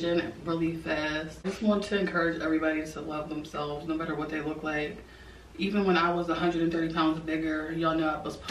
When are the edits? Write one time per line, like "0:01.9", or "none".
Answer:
0:01.5